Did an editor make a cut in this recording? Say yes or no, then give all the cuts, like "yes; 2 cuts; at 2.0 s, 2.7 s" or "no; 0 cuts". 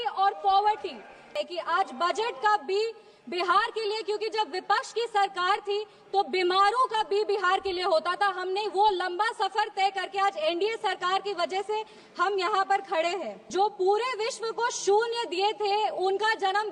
yes; 2 cuts; at 1.3 s, 13.4 s